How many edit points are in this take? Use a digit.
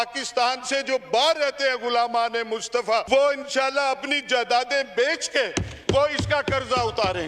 1